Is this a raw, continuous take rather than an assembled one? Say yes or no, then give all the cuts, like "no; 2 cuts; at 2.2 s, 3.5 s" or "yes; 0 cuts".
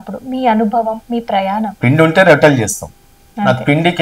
no; 1 cut; at 1.7 s